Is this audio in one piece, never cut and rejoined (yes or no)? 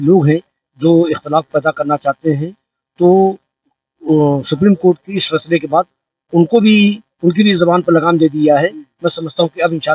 yes